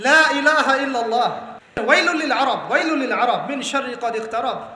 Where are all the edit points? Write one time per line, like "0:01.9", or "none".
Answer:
0:01.8